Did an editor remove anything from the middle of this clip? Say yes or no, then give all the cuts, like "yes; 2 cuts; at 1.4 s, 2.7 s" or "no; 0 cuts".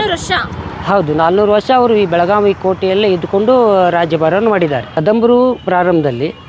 yes; 1 cut; at 4.9 s